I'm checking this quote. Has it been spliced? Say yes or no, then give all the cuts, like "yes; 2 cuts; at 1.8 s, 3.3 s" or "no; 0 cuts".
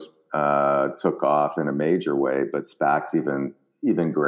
no; 0 cuts